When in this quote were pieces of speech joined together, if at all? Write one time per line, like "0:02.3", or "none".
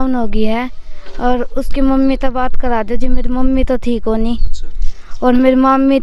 none